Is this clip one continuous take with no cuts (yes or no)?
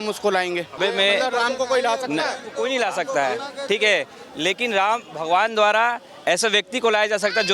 no